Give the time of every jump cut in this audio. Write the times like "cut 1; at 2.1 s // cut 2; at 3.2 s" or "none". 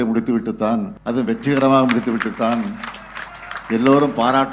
cut 1; at 1.0 s